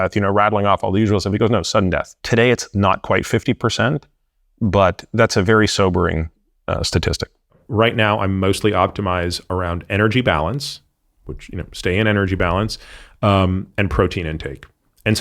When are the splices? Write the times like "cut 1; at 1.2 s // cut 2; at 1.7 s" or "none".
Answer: cut 1; at 2.1 s // cut 2; at 7.6 s